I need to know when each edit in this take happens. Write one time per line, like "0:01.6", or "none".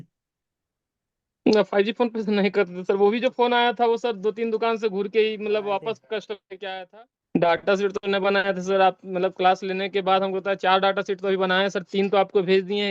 0:06.8

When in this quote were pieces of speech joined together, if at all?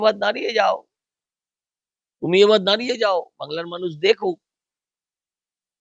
none

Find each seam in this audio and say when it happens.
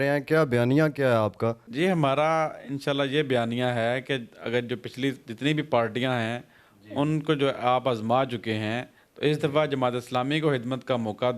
none

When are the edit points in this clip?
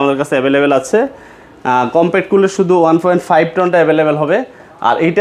none

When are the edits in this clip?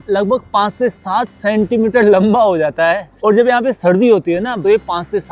none

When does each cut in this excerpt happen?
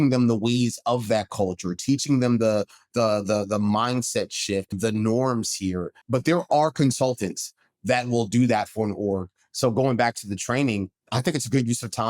0:04.7
0:06.0
0:11.0

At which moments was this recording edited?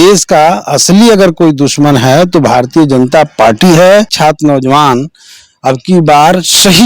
0:04.1

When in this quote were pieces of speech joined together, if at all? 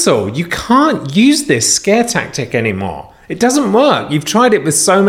none

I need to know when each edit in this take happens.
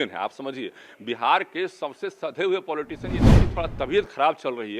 0:03.3

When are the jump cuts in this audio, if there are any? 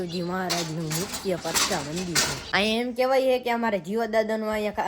0:02.4

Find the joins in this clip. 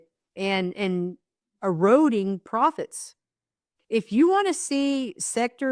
0:01.5

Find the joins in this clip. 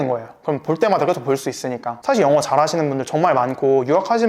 0:02.0

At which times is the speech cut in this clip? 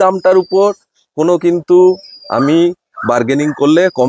none

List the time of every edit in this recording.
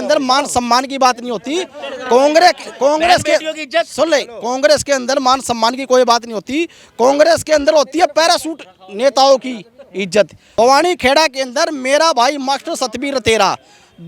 0:10.4

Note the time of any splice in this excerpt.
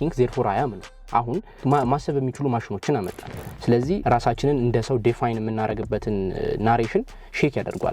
0:01.6
0:04.0

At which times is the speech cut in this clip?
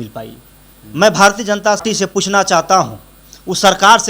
0:01.9

